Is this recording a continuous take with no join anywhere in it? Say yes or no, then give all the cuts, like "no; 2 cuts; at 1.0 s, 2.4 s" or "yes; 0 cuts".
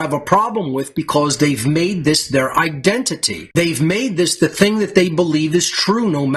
yes; 0 cuts